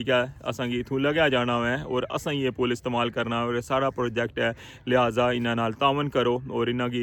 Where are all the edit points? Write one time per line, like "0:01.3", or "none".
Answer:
none